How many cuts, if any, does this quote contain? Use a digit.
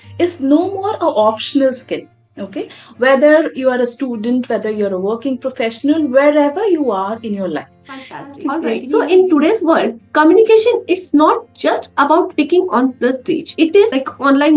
1